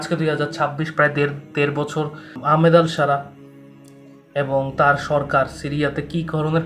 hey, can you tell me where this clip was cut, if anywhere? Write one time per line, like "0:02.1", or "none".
0:02.4